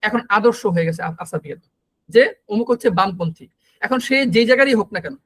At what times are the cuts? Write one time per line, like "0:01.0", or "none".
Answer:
none